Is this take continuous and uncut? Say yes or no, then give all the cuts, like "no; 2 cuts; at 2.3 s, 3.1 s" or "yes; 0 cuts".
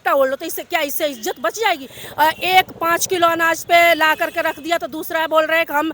no; 1 cut; at 2.0 s